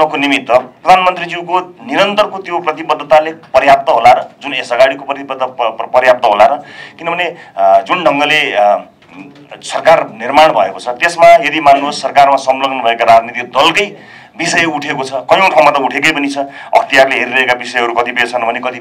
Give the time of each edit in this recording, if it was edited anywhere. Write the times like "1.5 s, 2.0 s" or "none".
none